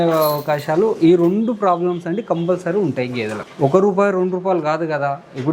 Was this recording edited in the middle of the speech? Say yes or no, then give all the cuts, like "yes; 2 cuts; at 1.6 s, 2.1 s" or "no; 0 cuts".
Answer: yes; 1 cut; at 3.4 s